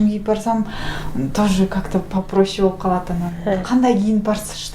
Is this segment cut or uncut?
uncut